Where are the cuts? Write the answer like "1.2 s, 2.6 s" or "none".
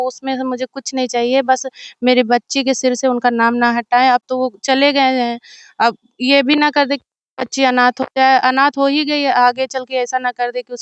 none